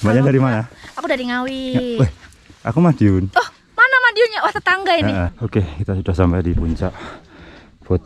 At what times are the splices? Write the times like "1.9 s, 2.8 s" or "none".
5.3 s